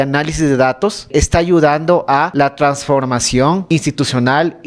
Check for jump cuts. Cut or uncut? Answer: cut